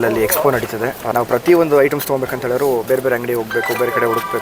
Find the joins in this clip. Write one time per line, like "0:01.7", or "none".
0:01.0